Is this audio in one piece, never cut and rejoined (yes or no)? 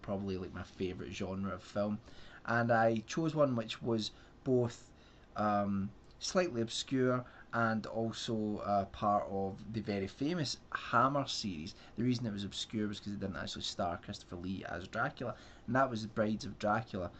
no